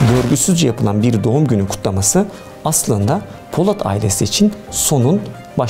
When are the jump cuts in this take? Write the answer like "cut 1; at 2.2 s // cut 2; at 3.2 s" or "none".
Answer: none